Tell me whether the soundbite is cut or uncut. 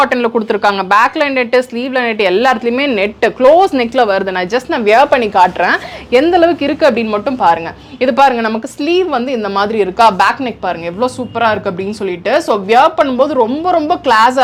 uncut